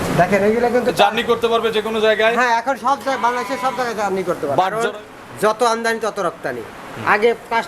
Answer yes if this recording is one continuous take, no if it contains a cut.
no